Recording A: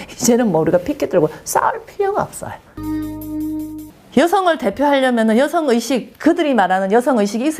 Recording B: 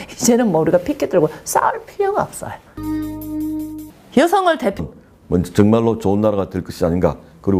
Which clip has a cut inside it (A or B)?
A